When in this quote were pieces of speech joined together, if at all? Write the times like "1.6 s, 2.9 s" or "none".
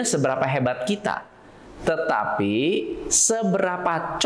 none